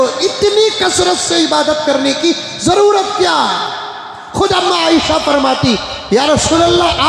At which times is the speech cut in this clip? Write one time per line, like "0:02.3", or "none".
none